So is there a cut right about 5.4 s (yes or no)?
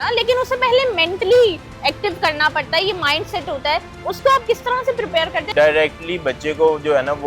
yes